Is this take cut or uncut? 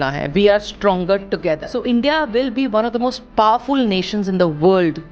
cut